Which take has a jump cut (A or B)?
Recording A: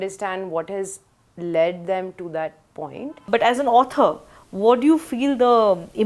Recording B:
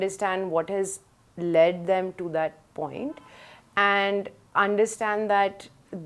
A